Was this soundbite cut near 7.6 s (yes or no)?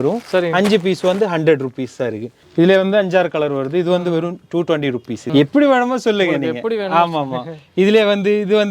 no